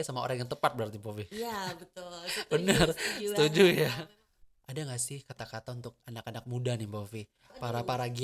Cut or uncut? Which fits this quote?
cut